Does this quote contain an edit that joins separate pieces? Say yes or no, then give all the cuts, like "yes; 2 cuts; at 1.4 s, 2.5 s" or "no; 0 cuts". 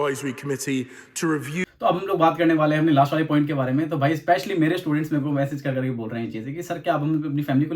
yes; 1 cut; at 1.6 s